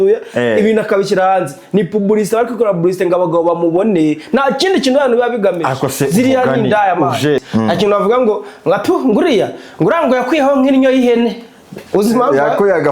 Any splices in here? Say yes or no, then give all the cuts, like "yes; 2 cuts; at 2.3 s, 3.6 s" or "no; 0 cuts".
yes; 1 cut; at 7.4 s